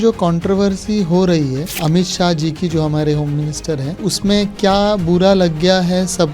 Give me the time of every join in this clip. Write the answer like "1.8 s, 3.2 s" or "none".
1.7 s, 4.1 s